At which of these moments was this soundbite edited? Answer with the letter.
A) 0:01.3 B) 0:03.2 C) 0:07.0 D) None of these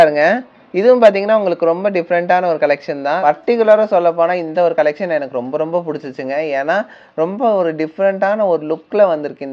B